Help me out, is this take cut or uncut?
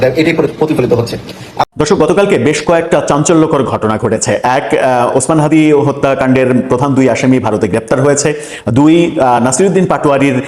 cut